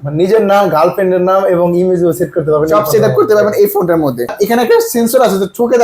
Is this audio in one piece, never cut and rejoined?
no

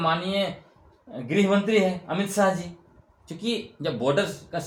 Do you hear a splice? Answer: no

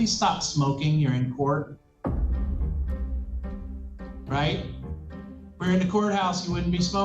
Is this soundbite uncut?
yes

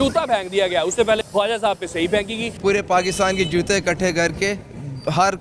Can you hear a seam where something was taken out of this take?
yes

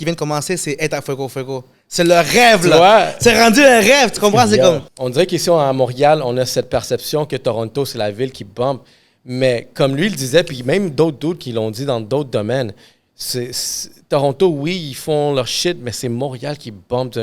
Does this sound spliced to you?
yes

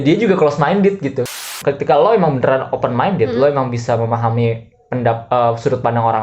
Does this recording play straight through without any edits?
no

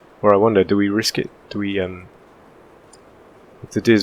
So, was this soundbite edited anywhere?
no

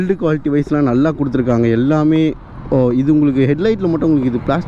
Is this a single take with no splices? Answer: yes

